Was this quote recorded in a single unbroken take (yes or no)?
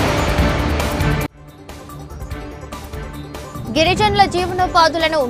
yes